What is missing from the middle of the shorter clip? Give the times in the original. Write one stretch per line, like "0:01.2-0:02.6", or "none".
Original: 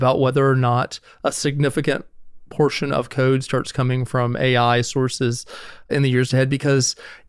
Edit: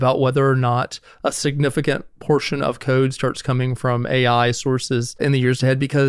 0:02.1-0:02.4
0:05.4-0:05.8

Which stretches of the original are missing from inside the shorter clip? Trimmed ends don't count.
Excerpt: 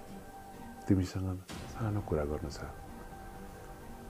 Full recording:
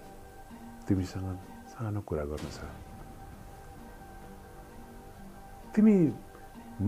0:02.6-0:03.5

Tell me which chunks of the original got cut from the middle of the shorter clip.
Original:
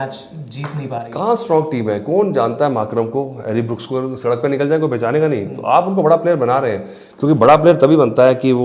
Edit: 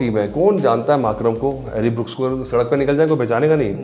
none

